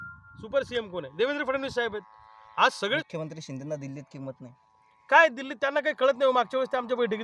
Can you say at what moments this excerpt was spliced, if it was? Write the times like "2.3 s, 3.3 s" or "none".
3.0 s

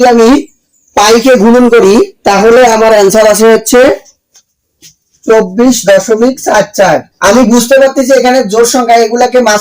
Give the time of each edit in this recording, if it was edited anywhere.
7.1 s

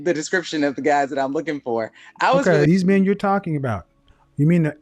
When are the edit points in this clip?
2.7 s

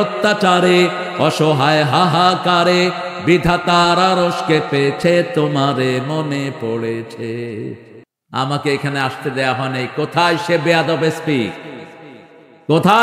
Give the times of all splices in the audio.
8.2 s

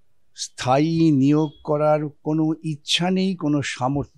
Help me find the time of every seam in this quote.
none

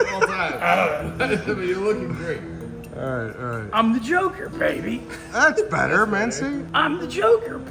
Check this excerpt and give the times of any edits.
6.7 s

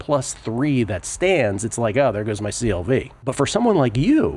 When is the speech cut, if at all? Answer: 3.1 s

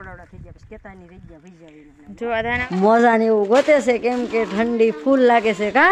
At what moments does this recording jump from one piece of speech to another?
2.6 s

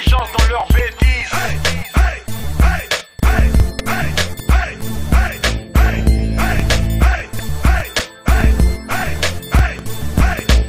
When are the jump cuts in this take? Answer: none

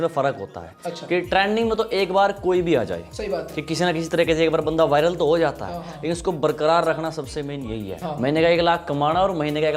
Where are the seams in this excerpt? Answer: 8.0 s

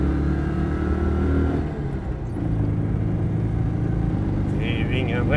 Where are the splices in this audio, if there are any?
none

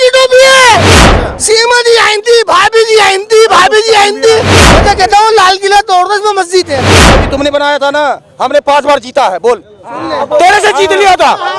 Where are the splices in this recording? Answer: 0.9 s, 4.8 s, 7.1 s

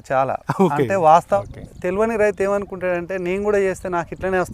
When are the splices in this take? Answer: 1.4 s

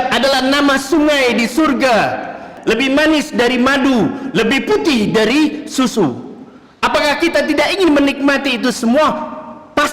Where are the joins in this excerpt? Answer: 2.5 s

